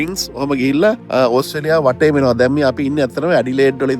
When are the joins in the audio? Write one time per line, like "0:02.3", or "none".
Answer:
0:01.0